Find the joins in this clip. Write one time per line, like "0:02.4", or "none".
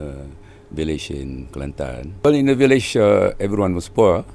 0:02.2